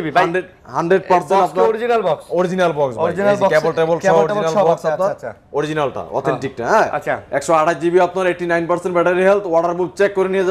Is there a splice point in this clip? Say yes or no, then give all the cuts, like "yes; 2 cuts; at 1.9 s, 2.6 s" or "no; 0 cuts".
no; 0 cuts